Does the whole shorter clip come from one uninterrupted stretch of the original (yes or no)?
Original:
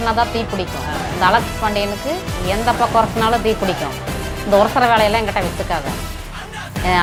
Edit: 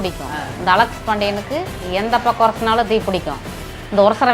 yes